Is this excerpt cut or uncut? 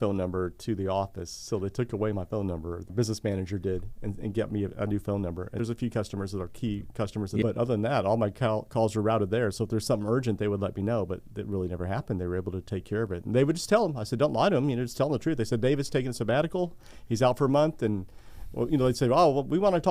cut